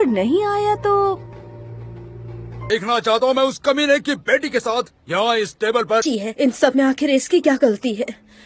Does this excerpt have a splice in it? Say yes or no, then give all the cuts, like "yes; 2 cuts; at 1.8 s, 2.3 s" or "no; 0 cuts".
yes; 2 cuts; at 2.6 s, 6.0 s